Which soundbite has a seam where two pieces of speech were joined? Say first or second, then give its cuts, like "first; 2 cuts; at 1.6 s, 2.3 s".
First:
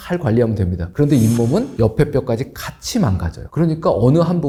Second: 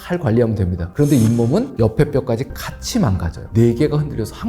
second; 1 cut; at 3.5 s